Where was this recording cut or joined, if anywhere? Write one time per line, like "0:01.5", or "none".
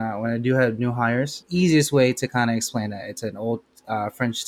0:01.4